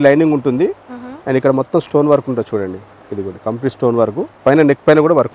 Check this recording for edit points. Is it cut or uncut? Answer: uncut